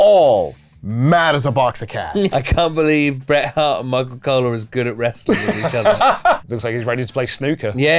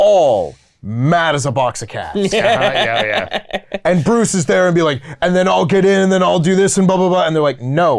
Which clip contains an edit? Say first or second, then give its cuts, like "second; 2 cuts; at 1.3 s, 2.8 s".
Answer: first; 2 cuts; at 2.3 s, 6.5 s